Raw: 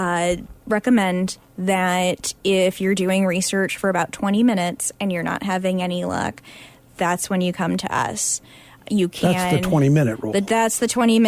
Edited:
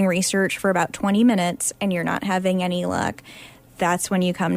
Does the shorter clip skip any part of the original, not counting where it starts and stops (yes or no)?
no